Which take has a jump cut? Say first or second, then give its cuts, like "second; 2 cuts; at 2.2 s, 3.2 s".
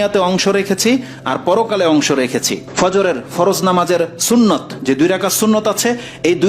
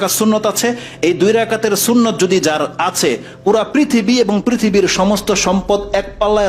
first; 1 cut; at 2.6 s